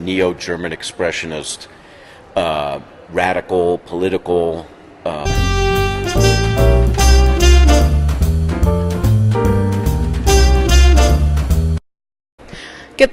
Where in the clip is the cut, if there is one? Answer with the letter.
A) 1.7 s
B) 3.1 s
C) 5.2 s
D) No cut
D